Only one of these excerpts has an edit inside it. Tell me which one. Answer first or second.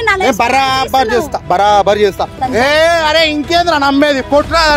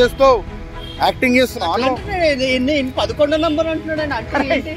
first